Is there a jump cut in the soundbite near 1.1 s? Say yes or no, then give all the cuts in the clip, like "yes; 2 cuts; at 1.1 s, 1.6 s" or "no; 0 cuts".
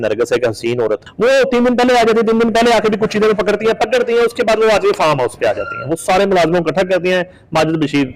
yes; 1 cut; at 1.1 s